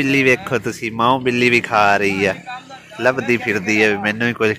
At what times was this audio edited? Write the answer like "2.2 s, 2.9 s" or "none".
none